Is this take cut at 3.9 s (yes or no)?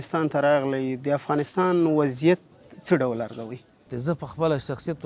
yes